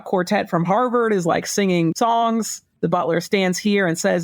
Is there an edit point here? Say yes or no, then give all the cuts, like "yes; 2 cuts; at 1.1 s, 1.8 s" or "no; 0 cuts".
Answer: yes; 2 cuts; at 1.9 s, 2.8 s